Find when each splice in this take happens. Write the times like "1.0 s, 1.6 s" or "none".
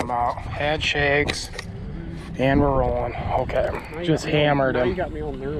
3.9 s